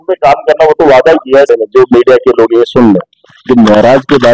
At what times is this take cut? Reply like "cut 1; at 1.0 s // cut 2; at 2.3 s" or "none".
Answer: cut 1; at 1.5 s